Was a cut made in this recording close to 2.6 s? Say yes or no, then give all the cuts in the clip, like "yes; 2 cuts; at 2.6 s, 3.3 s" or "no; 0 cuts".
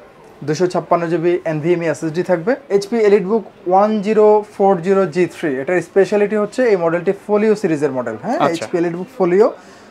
yes; 1 cut; at 2.6 s